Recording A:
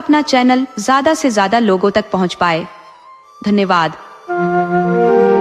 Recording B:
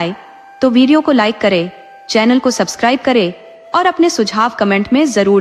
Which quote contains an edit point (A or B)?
A